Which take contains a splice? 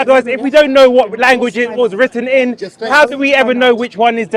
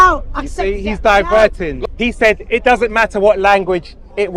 second; 1 cut; at 1.7 s

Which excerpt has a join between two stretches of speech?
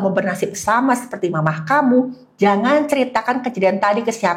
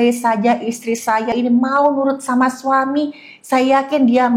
second; 1 cut; at 1.3 s

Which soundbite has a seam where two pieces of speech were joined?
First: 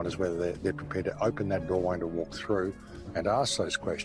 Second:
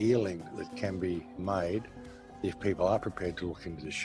second; 1 cut; at 1.3 s

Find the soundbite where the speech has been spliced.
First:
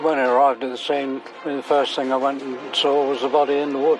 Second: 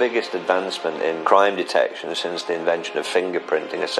second; 1 cut; at 1.2 s

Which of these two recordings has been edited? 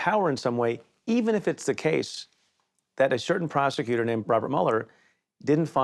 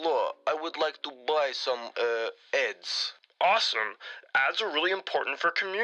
first; 1 cut; at 4.2 s

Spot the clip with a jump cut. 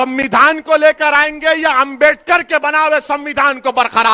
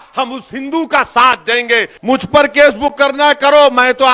second; 1 cut; at 1.9 s

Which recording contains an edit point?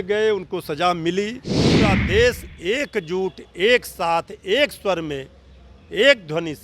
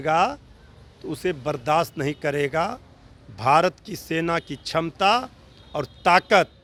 first; 1 cut; at 1.9 s

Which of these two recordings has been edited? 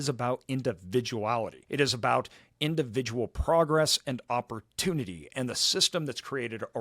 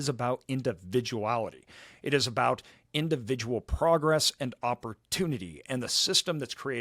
first; 1 cut; at 1.6 s

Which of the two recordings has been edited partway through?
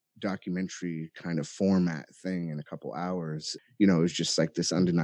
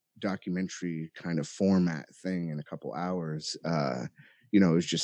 first; 1 cut; at 3.5 s

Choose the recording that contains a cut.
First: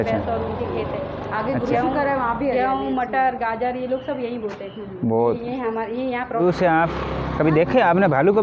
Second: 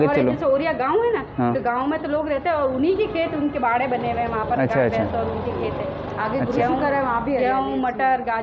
first; 1 cut; at 6.4 s

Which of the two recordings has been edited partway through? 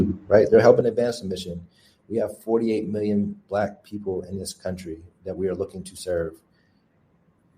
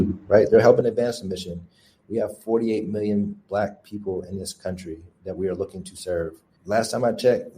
second; 1 cut; at 6.5 s

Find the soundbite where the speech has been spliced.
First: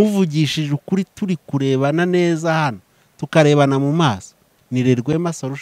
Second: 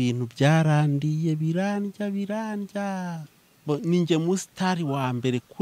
second; 1 cut; at 3.6 s

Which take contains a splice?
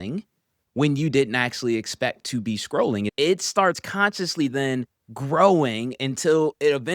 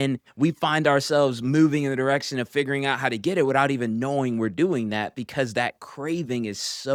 first; 1 cut; at 3.1 s

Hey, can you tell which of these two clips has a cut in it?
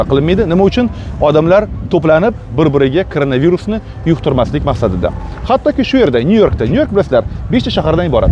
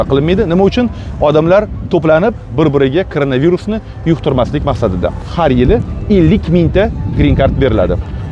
second; 1 cut; at 5.2 s

